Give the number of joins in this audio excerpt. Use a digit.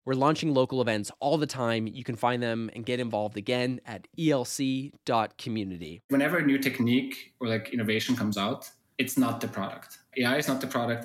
2